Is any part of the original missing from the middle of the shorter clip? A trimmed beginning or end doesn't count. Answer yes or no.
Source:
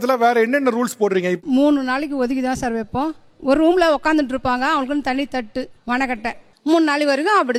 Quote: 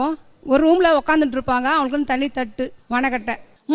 no